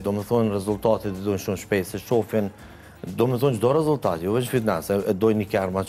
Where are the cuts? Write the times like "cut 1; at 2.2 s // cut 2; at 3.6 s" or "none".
none